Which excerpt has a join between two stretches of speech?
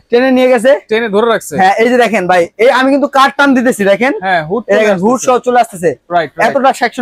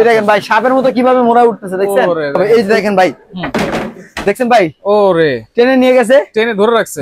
second; 1 cut; at 2.4 s

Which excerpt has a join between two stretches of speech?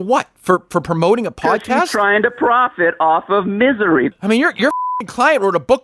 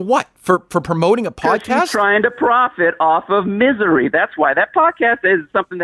first; 1 cut; at 4.1 s

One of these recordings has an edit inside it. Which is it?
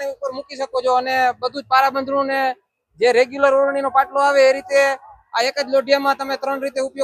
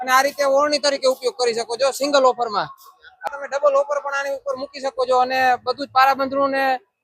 second; 1 cut; at 3.2 s

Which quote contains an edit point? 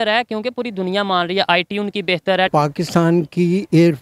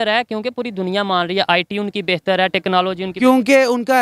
first; 1 cut; at 2.5 s

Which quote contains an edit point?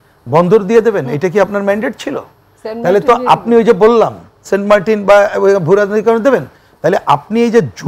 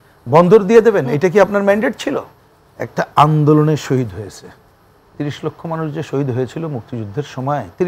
second; 1 cut; at 2.4 s

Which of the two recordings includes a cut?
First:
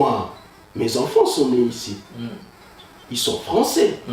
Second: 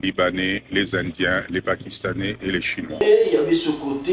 second; 1 cut; at 3.0 s

